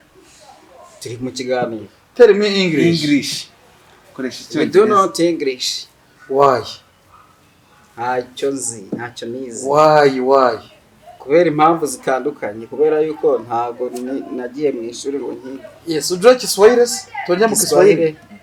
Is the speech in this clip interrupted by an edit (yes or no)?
no